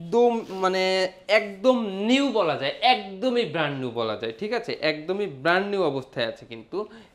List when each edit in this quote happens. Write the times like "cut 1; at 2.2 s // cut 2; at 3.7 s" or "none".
none